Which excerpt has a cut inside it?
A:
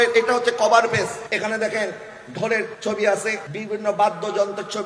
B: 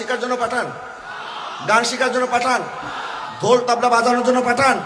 A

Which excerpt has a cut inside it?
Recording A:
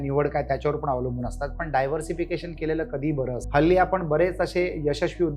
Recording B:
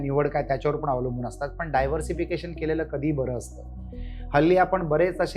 A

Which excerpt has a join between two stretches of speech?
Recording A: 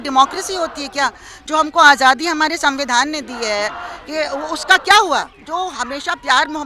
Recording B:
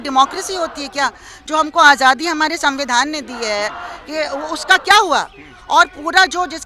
A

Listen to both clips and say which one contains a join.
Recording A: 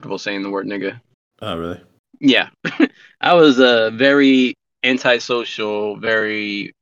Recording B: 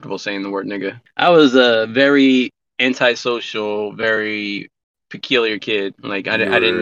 B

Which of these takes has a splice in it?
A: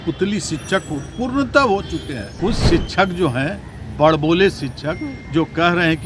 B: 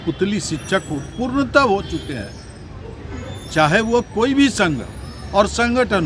A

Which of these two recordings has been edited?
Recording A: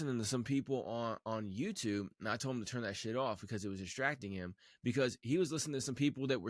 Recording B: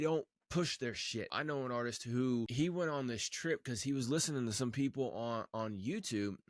B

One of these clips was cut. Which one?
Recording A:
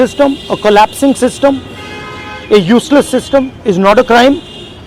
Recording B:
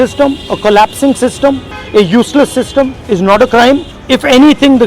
B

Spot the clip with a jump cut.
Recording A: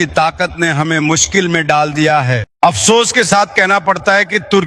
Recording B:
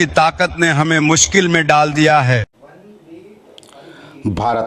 B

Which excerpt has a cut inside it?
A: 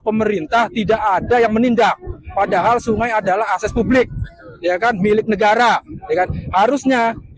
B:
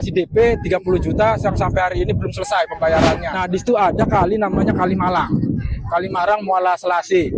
B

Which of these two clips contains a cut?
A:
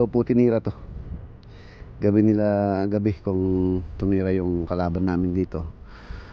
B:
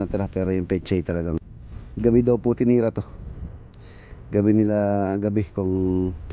B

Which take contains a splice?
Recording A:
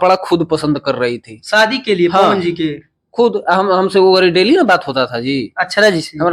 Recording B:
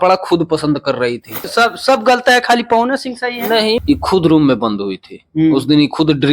B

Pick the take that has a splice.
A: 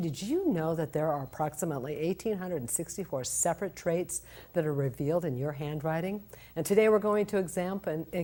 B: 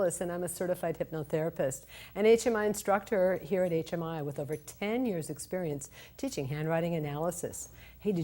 B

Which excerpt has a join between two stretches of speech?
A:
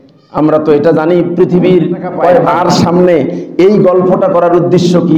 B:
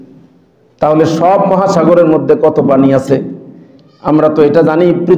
A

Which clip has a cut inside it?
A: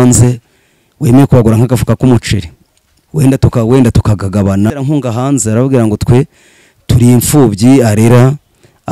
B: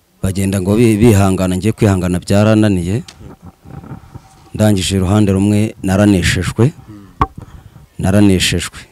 A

